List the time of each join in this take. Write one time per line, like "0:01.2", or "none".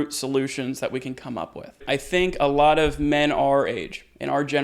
0:01.8